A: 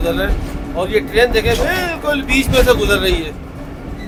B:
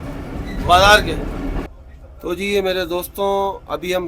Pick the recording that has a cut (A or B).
B